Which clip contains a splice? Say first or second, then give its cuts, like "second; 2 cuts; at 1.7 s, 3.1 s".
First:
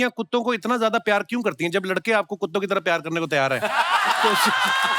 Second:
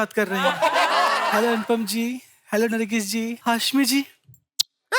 second; 2 cuts; at 1.2 s, 3.4 s